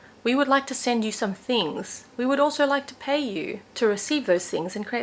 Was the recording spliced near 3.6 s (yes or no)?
yes